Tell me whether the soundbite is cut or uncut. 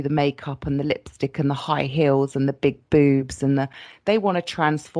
uncut